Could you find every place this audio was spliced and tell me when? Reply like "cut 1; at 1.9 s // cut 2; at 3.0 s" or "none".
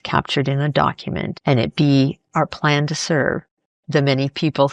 cut 1; at 1.3 s